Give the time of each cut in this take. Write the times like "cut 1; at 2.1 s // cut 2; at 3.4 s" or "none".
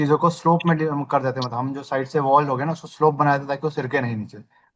none